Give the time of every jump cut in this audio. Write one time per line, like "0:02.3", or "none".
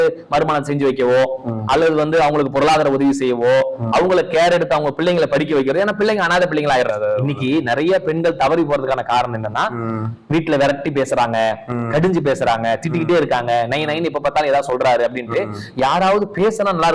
0:06.9